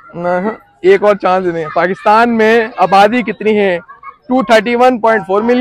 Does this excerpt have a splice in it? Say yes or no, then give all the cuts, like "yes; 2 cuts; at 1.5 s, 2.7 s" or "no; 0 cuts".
no; 0 cuts